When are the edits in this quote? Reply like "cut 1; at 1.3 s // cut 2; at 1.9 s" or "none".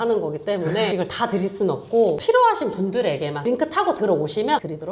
cut 1; at 3.4 s